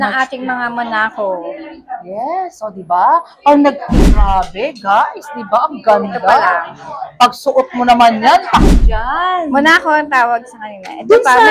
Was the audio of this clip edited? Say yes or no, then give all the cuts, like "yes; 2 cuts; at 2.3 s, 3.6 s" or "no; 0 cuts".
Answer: yes; 2 cuts; at 4.1 s, 8.7 s